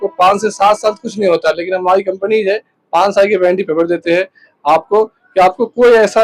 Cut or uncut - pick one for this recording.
uncut